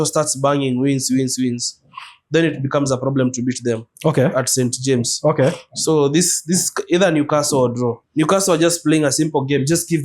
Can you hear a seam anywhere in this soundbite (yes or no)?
yes